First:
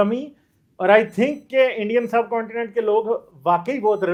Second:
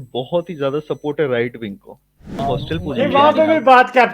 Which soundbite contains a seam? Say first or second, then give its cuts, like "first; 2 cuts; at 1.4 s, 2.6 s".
second; 1 cut; at 2.4 s